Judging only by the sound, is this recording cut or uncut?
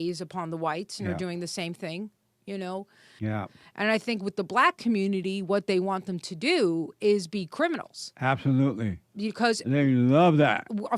cut